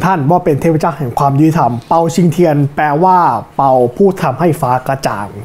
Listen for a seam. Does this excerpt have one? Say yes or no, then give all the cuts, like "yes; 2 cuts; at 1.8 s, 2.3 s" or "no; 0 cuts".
no; 0 cuts